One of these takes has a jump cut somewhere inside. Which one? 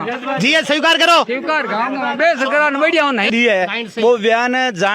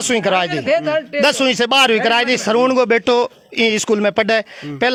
first; 1 cut; at 3.3 s

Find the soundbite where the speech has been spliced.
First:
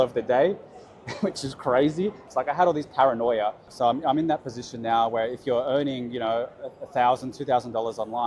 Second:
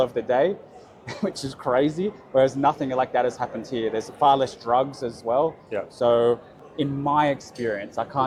first; 2 cuts; at 2.3 s, 3.7 s

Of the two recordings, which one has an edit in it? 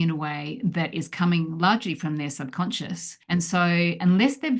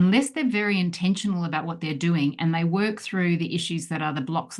first; 1 cut; at 3.1 s

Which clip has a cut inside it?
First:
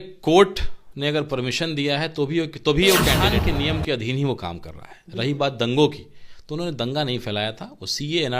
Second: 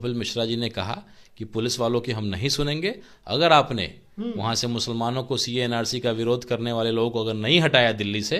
first; 1 cut; at 3.3 s

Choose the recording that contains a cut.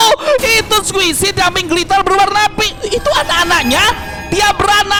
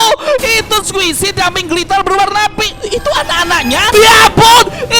second; 1 cut; at 3.9 s

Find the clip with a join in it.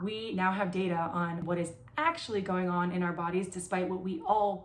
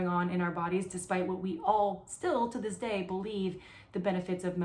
first; 1 cut; at 1.4 s

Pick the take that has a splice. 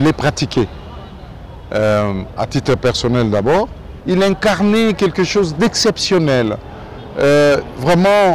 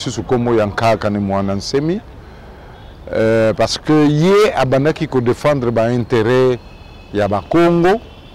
first; 1 cut; at 3.9 s

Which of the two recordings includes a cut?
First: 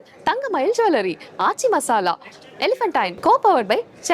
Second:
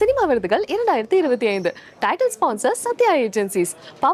first; 1 cut; at 3.1 s

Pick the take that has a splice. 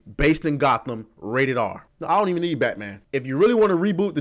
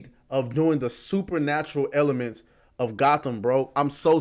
first; 2 cuts; at 1.9 s, 2.9 s

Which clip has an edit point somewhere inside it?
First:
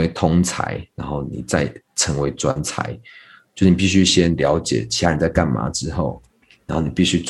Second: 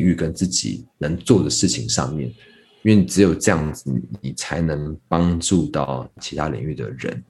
second; 1 cut; at 6.2 s

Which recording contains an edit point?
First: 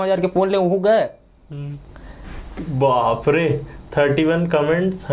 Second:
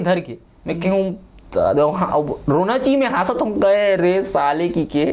first; 1 cut; at 2.2 s

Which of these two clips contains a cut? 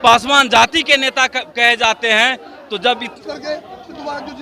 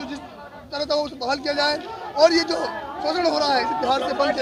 first; 1 cut; at 3.2 s

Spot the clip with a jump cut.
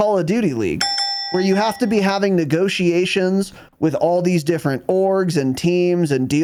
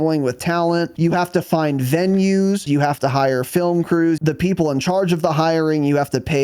second; 3 cuts; at 0.9 s, 2.7 s, 4.2 s

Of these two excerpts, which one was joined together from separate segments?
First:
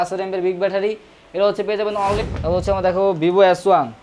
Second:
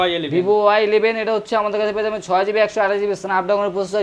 first; 1 cut; at 2.2 s

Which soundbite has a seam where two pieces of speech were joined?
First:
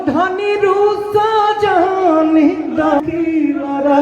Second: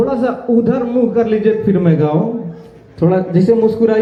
first; 1 cut; at 3.0 s

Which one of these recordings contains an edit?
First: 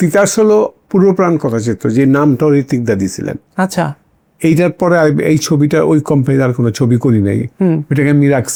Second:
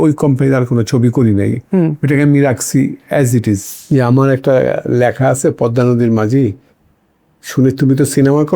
second; 1 cut; at 3.7 s

